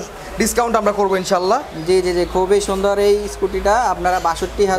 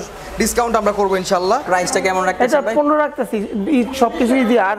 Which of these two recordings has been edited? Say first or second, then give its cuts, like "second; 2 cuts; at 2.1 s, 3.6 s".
second; 1 cut; at 1.6 s